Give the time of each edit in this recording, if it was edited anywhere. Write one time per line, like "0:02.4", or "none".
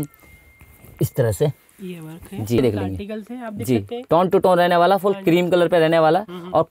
0:02.6